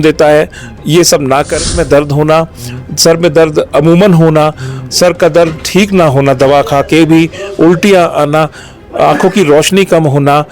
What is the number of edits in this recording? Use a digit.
1